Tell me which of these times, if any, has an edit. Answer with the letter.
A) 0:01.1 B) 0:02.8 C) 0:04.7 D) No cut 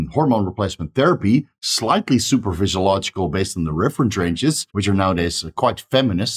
C